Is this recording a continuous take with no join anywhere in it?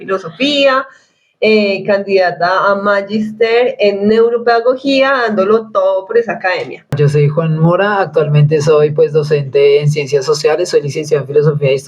no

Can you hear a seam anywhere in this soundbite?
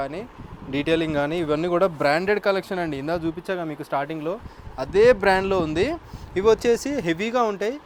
no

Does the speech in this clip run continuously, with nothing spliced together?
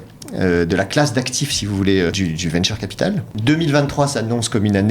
no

